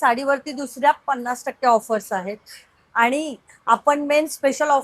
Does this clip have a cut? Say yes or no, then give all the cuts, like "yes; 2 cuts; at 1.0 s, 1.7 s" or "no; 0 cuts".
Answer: no; 0 cuts